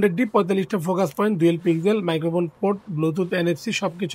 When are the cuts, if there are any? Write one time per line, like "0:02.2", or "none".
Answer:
none